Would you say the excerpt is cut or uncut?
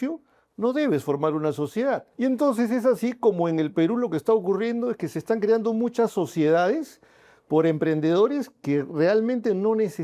cut